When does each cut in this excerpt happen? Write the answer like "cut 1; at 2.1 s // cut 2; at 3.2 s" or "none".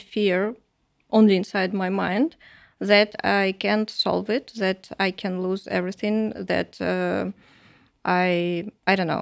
none

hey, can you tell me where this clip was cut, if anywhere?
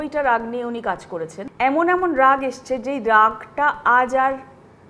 cut 1; at 1.4 s

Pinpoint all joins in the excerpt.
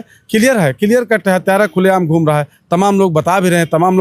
none

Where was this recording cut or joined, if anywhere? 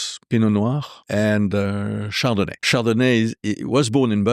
cut 1; at 0.9 s // cut 2; at 2.7 s

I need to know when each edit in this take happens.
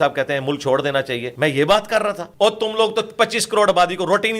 cut 1; at 1.3 s // cut 2; at 2.2 s

